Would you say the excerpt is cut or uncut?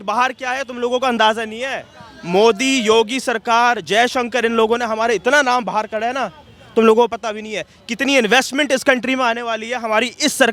uncut